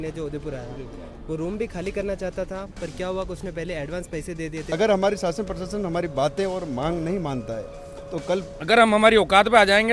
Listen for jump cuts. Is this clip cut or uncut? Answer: cut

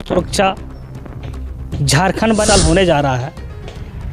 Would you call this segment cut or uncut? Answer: cut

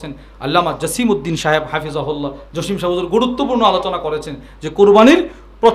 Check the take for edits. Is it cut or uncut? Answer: uncut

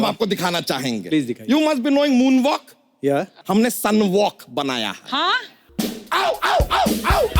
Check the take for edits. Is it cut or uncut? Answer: cut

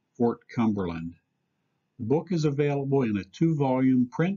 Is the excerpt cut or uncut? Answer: uncut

